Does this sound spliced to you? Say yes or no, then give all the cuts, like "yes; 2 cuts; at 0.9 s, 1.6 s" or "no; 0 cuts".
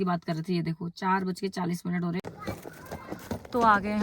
yes; 1 cut; at 2.2 s